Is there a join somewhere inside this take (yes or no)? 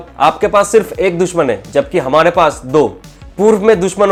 no